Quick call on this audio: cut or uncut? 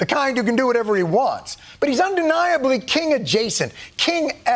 uncut